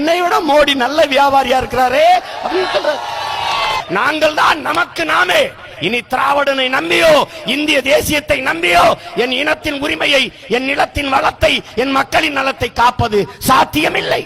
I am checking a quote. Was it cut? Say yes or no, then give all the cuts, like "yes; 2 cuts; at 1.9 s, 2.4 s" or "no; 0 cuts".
yes; 1 cut; at 3.8 s